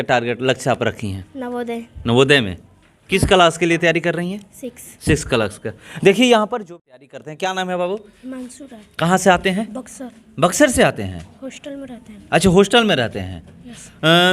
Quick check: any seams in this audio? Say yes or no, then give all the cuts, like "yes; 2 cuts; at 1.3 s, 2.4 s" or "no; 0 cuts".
yes; 1 cut; at 6.6 s